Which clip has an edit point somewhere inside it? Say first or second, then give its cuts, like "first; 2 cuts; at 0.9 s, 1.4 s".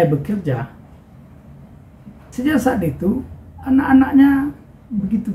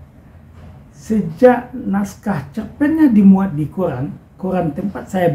first; 1 cut; at 2.3 s